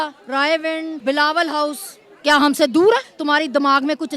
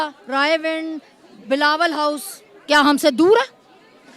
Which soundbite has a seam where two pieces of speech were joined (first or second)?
first